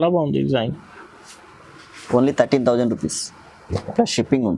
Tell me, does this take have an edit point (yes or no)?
no